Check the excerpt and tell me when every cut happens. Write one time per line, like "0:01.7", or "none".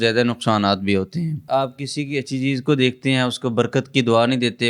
0:01.4